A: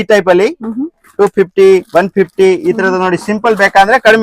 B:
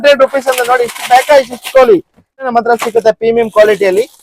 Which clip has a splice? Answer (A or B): B